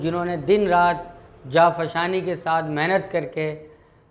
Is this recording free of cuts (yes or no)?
yes